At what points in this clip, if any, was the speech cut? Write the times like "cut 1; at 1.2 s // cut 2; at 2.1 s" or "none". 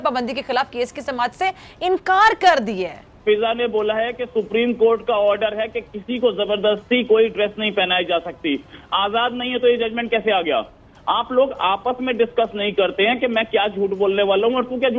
cut 1; at 3.1 s